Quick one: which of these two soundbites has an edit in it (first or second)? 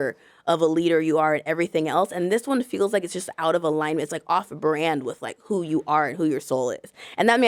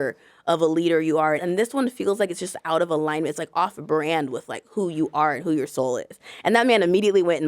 second